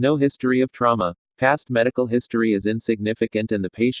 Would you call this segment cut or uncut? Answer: cut